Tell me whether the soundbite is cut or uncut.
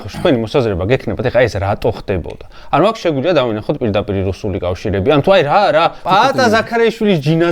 uncut